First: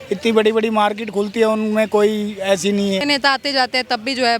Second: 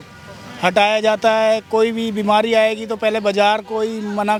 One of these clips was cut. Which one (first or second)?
first